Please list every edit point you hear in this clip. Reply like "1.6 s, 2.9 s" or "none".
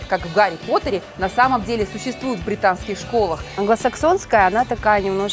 3.5 s